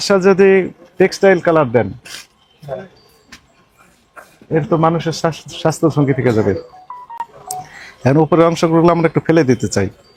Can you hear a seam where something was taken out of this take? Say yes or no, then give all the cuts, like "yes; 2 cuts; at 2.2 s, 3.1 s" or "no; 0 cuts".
no; 0 cuts